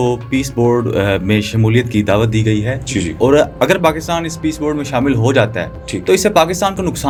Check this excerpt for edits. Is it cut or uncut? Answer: uncut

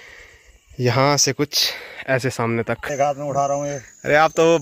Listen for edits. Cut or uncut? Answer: cut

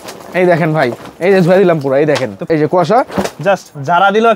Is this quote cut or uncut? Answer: cut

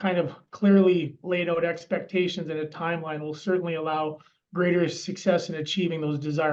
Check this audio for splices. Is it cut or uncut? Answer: uncut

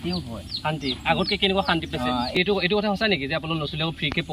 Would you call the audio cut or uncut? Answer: cut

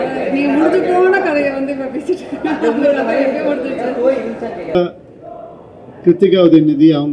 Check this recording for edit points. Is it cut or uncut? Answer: cut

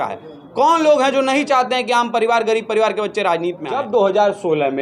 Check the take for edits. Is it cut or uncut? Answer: cut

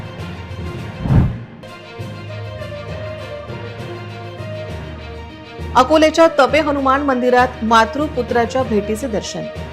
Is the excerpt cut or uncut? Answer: cut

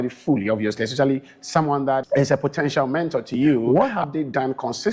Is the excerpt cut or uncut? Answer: cut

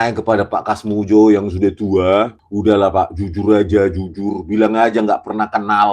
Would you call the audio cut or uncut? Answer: cut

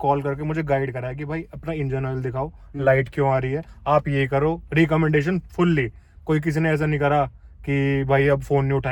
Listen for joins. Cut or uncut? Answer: uncut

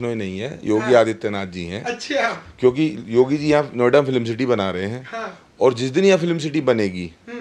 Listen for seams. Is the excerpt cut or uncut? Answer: uncut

